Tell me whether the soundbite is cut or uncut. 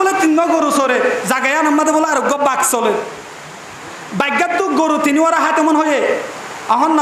uncut